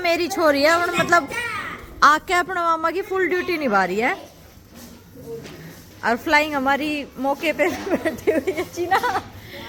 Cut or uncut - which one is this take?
uncut